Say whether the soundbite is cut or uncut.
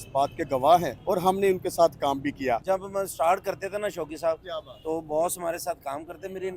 cut